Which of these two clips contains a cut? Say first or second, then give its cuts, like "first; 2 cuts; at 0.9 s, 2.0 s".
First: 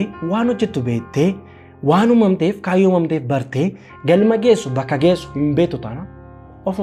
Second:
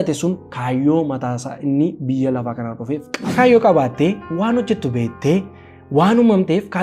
second; 1 cut; at 3.2 s